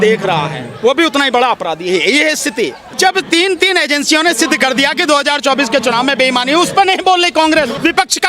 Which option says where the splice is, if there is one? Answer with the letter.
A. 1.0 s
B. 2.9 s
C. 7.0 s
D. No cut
B